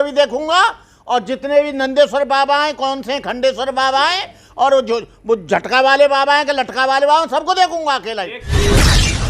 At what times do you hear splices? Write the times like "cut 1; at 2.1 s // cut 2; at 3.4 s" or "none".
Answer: cut 1; at 8.4 s